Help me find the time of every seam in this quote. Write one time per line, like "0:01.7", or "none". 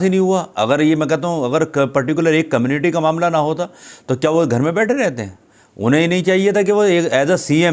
none